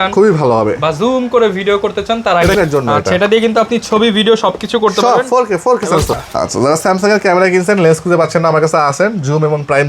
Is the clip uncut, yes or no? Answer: no